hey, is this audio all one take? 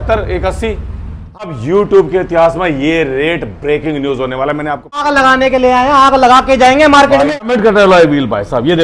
no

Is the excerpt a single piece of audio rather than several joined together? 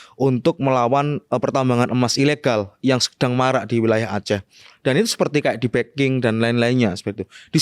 yes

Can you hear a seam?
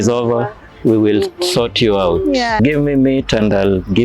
yes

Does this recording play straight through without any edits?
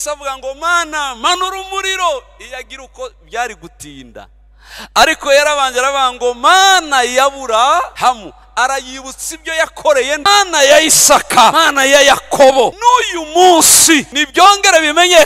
no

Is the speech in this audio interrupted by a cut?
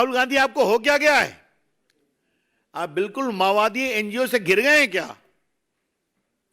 no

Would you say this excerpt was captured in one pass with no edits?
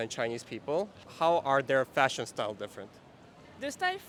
yes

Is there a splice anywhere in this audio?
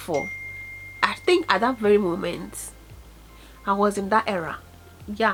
no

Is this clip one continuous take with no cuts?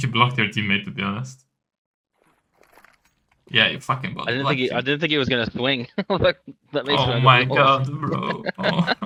yes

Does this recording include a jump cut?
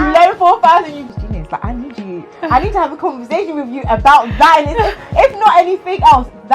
yes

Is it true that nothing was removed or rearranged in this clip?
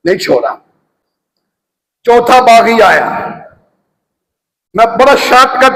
yes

